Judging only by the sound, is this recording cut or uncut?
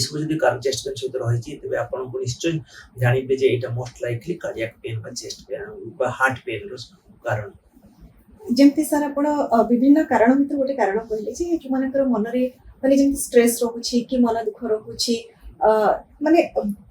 uncut